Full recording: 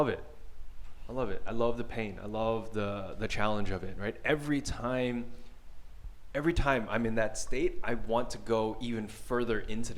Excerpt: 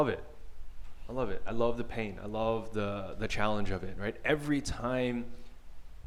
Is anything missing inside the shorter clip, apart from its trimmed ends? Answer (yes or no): no